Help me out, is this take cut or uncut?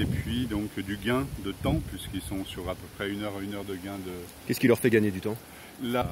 uncut